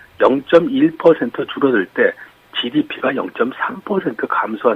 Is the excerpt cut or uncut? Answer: cut